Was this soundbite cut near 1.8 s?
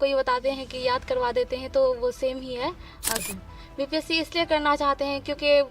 no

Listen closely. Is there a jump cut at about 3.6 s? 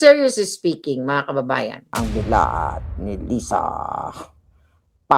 no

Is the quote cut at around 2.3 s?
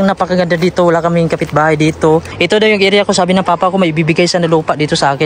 yes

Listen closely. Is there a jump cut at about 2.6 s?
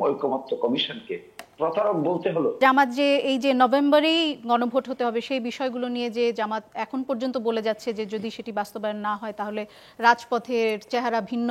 yes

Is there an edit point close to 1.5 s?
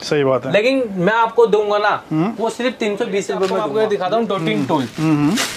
no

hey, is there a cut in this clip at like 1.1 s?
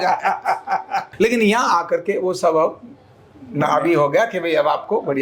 yes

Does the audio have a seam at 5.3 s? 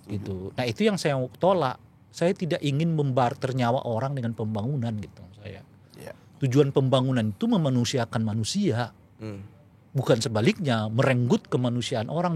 no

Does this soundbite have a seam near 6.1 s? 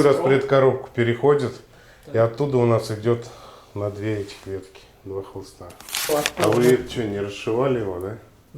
yes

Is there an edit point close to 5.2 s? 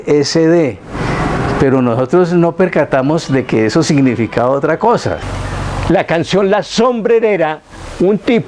yes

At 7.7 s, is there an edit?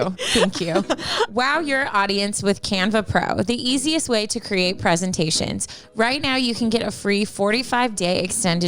no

